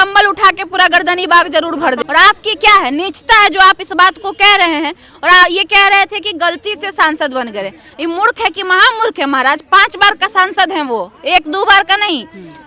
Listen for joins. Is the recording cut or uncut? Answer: cut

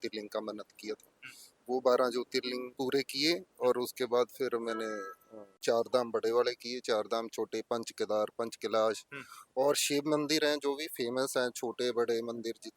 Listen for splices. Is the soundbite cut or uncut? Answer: uncut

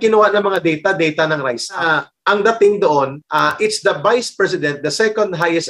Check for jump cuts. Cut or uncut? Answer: cut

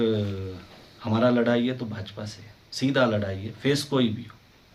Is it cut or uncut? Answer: uncut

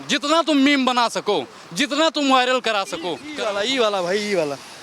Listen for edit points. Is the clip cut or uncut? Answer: cut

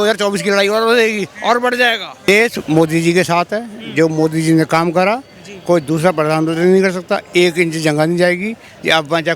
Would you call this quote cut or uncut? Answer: cut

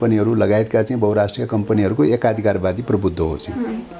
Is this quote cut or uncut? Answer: uncut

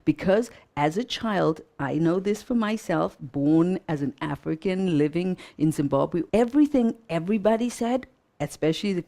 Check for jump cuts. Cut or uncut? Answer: cut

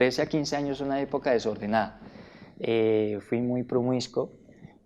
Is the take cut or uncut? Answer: uncut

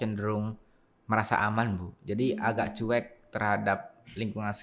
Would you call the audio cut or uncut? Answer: uncut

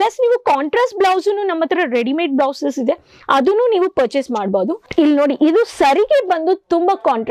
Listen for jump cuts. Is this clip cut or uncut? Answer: cut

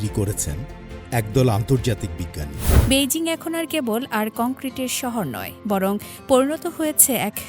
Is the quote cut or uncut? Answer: cut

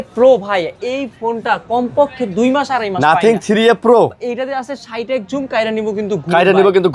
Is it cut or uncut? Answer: uncut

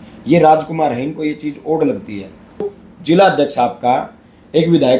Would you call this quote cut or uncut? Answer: cut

